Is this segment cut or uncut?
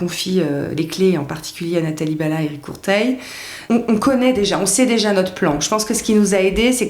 cut